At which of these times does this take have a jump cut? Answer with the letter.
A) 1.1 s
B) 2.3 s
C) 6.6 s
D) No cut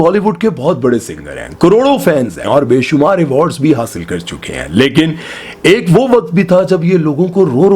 B